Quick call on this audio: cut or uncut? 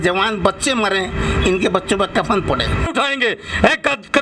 cut